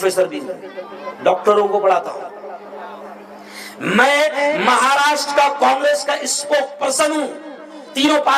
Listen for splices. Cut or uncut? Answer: uncut